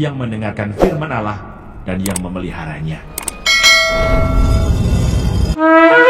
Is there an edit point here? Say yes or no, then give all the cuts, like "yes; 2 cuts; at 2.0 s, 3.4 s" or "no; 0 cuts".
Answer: no; 0 cuts